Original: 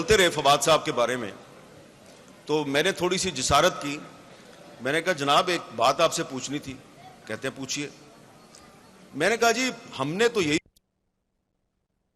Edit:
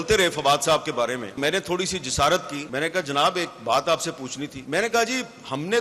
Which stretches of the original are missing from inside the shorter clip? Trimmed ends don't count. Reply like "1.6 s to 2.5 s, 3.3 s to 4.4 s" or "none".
1.4 s to 2.7 s, 3.9 s to 4.7 s, 6.7 s to 9.1 s